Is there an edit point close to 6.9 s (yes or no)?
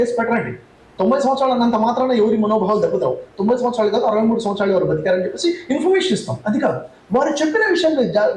no